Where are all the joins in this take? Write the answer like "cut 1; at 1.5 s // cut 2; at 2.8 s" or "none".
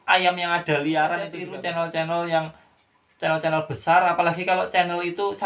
cut 1; at 1.4 s

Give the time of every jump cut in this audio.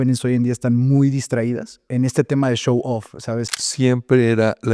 cut 1; at 1.9 s // cut 2; at 3.5 s

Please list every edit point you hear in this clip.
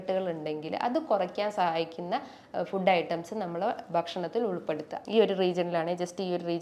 cut 1; at 4.9 s

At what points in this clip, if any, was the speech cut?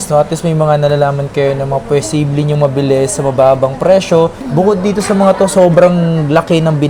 none

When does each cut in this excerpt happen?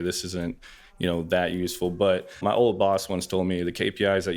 cut 1; at 2.4 s

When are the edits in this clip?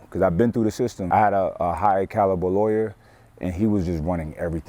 cut 1; at 1.1 s

